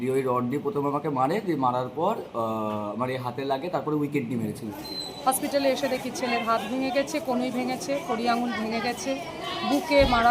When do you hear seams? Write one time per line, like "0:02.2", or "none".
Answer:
0:04.7